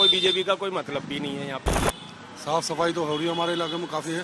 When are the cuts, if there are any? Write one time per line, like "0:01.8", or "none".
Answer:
0:01.8